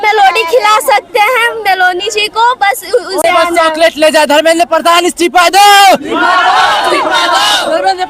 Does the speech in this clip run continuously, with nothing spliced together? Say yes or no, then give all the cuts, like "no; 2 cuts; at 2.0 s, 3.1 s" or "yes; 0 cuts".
no; 1 cut; at 3.2 s